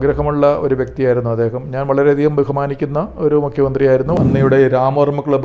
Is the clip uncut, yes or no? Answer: no